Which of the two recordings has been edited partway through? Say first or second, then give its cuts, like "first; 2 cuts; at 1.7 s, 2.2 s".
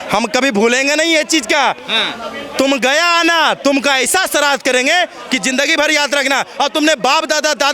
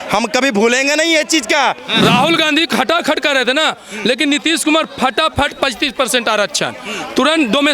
second; 1 cut; at 2.0 s